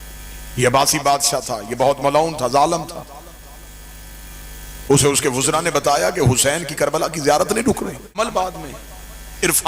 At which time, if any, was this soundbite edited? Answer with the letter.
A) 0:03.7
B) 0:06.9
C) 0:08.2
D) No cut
C